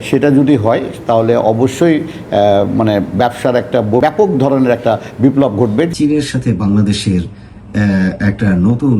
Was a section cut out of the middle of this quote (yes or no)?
yes